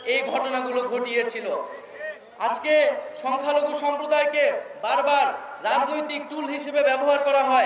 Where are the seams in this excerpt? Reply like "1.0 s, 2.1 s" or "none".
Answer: none